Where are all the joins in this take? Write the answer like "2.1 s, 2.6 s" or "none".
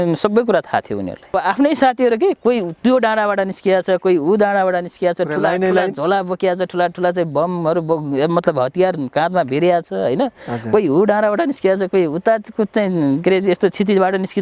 1.3 s